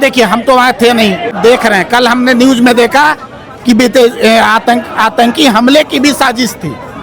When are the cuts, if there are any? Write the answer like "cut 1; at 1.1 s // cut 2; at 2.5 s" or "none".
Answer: cut 1; at 1.3 s